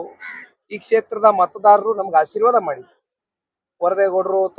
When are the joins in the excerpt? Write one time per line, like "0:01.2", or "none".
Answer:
none